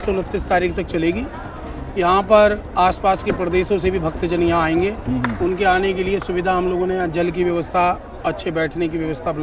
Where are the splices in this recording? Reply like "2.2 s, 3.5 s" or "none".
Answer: none